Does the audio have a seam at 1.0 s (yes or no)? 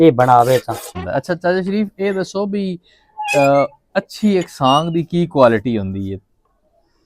yes